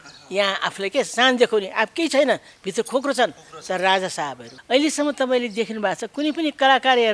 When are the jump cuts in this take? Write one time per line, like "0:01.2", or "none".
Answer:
0:04.5